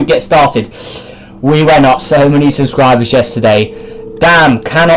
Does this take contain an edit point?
yes; 1 cut; at 1.9 s

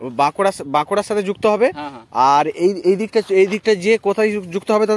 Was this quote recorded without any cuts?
yes; 0 cuts

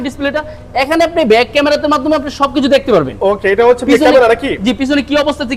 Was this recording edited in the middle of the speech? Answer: no; 0 cuts

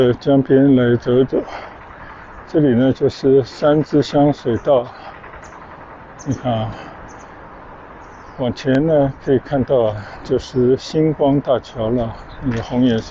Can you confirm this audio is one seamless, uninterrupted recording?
yes; 0 cuts

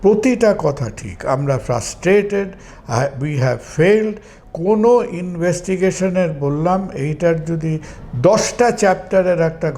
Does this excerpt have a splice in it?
no; 0 cuts

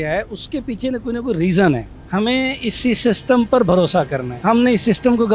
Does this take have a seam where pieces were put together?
yes; 2 cuts; at 1.9 s, 4.2 s

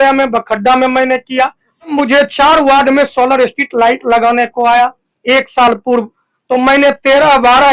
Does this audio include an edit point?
yes; 1 cut; at 1.9 s

